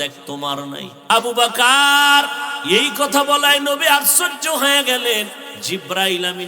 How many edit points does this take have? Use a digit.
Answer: 3